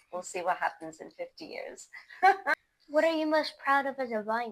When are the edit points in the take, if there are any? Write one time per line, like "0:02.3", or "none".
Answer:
0:02.7